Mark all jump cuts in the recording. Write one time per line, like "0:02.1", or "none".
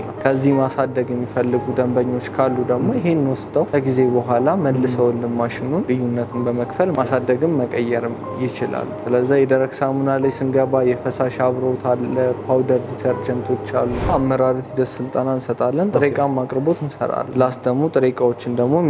0:03.7
0:05.9
0:06.9
0:14.1
0:17.3